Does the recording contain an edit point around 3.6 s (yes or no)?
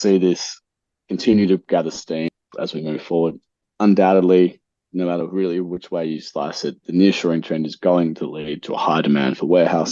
yes